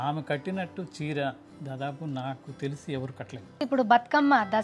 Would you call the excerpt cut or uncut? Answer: cut